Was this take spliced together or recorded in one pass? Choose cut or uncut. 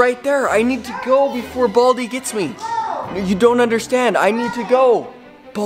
uncut